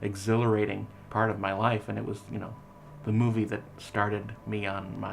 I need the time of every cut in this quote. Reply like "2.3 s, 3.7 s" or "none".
1.0 s